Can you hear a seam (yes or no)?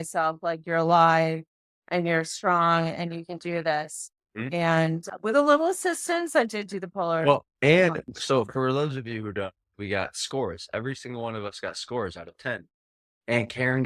no